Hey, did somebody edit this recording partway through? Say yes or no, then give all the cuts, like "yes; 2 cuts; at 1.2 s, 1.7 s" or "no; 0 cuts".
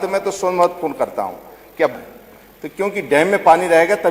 yes; 1 cut; at 1.9 s